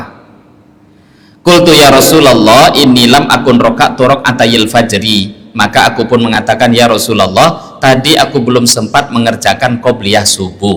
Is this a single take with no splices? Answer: yes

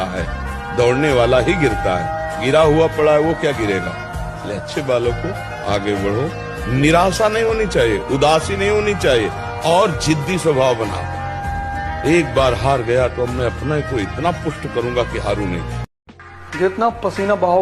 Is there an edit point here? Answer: yes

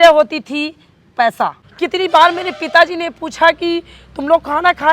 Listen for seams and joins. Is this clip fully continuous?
no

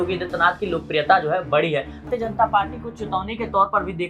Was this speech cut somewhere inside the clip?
yes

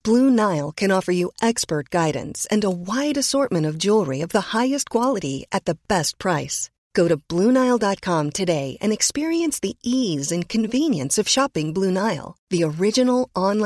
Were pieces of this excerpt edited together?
no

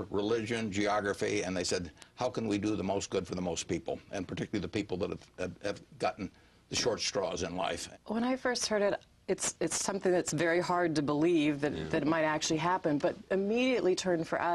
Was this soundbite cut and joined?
yes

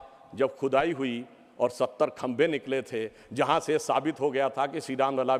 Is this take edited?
no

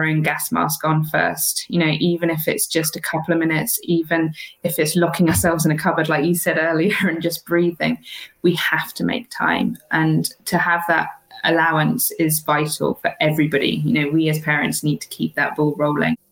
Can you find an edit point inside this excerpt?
no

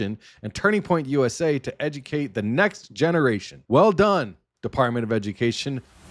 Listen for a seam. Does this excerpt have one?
no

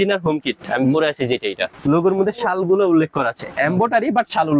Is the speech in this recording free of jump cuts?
no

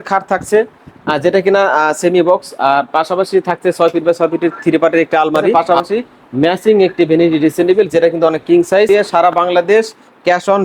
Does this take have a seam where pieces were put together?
yes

